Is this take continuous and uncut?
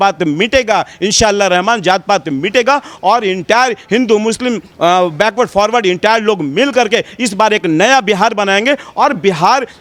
yes; 0 cuts

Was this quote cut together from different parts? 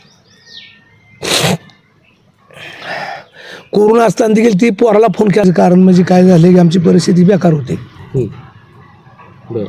yes; 1 cut; at 5.4 s

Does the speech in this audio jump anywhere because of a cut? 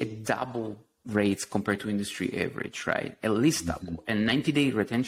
yes; 1 cut; at 1.0 s

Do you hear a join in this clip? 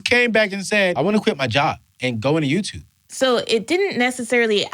yes; 2 cuts; at 1.1 s, 3.0 s

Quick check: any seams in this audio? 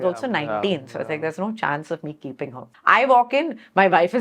yes; 1 cut; at 2.7 s

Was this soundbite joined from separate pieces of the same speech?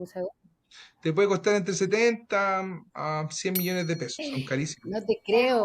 yes; 1 cut; at 4.2 s

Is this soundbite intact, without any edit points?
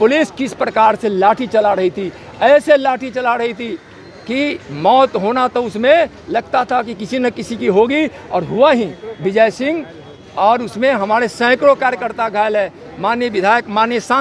yes; 0 cuts

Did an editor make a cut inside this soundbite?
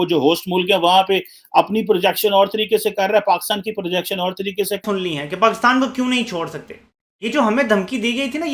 yes; 1 cut; at 4.8 s

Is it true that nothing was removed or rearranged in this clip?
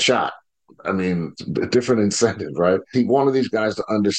no; 2 cuts; at 1.4 s, 2.9 s

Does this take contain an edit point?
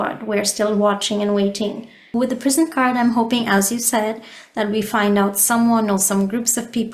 yes; 1 cut; at 2.1 s

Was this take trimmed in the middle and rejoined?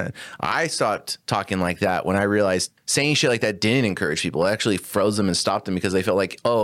yes; 1 cut; at 2.8 s

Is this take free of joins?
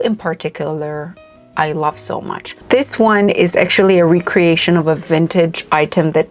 no; 1 cut; at 2.5 s

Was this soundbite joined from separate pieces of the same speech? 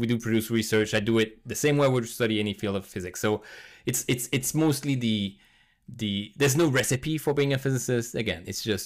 no; 0 cuts

